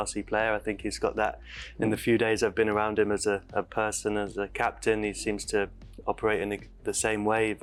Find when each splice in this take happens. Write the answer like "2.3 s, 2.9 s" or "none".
none